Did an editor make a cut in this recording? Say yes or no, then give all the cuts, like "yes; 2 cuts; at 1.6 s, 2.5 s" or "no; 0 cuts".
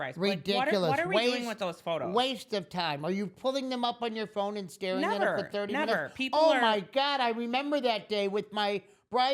no; 0 cuts